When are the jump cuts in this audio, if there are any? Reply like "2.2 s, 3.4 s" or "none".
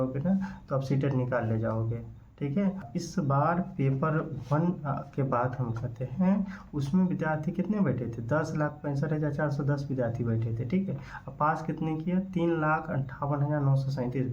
2.9 s